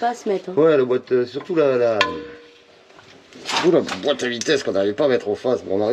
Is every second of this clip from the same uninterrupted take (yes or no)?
yes